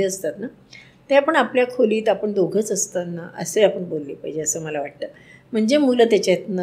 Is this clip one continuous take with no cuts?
yes; 0 cuts

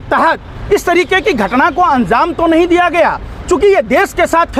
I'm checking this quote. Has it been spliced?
no; 0 cuts

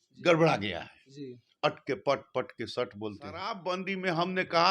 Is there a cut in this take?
yes; 1 cut; at 3.6 s

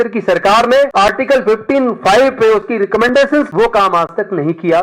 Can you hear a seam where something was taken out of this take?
yes; 2 cuts; at 0.9 s, 3.5 s

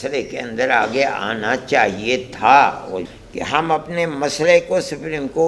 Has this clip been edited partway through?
yes; 1 cut; at 3.1 s

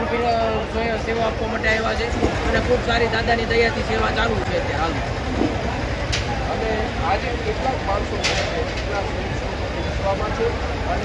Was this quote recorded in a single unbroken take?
yes; 0 cuts

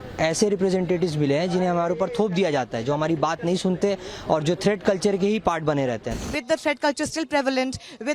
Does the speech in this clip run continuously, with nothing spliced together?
no; 1 cut; at 6.2 s

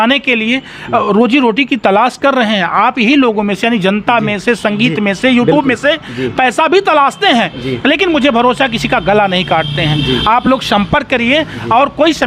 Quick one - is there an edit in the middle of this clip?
no; 0 cuts

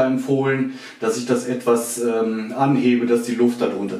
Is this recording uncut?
yes; 0 cuts

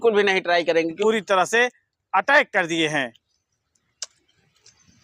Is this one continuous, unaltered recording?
no; 1 cut; at 1.0 s

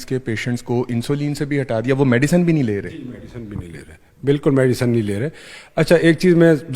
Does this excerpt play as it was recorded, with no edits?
yes; 0 cuts

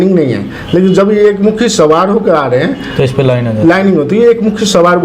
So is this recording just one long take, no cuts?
yes; 0 cuts

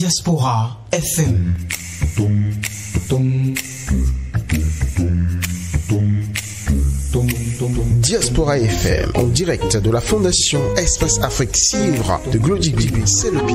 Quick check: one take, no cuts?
yes; 0 cuts

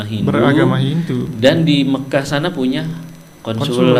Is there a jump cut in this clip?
no; 0 cuts

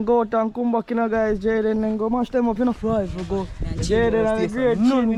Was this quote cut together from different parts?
no; 0 cuts

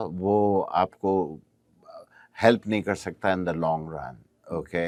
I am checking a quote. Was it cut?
no; 0 cuts

